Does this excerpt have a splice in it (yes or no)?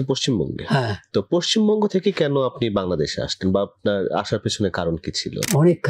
no